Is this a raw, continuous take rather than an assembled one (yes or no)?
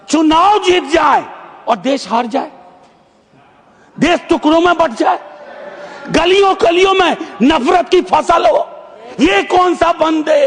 yes